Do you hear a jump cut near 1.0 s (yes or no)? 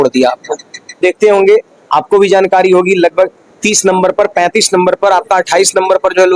yes